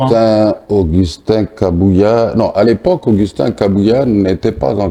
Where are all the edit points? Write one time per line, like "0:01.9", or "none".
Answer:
none